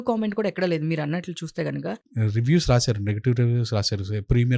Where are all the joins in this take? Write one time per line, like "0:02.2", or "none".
0:01.9